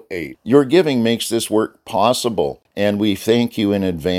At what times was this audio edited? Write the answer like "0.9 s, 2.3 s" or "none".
2.6 s